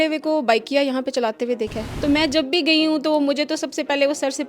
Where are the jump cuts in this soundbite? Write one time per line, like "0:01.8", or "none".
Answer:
0:01.8